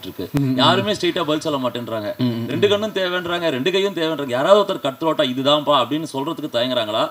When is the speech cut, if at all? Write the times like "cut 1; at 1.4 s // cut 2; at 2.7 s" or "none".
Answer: none

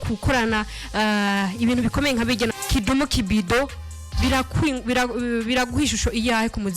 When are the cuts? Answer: cut 1; at 2.6 s

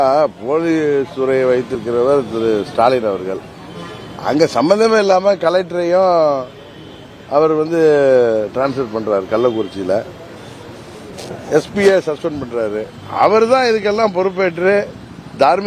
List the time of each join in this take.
none

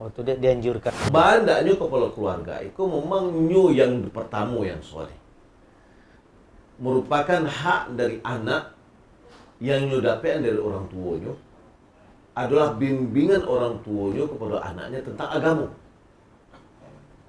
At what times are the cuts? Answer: cut 1; at 0.9 s

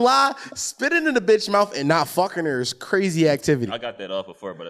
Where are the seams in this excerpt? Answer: cut 1; at 3.7 s

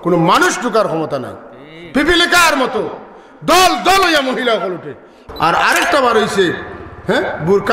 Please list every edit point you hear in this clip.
cut 1; at 5.2 s

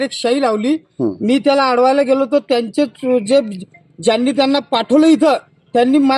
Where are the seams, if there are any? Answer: none

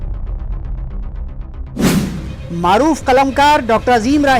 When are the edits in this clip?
cut 1; at 2.3 s

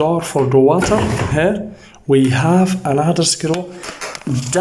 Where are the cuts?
none

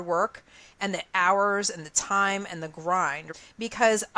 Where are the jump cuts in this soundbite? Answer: cut 1; at 3.3 s

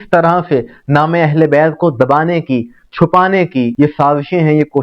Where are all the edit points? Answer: cut 1; at 3.7 s

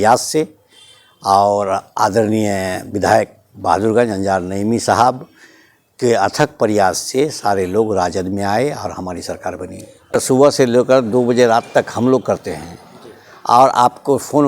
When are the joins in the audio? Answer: cut 1; at 10.1 s

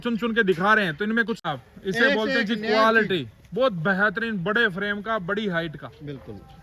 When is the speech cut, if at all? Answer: cut 1; at 1.4 s

